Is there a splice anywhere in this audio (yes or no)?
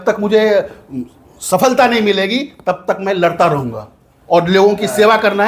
no